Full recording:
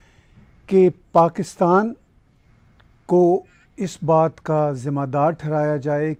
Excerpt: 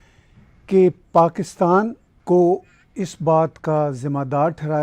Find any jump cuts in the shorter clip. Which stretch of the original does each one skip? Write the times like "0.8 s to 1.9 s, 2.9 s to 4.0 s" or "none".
2.1 s to 2.9 s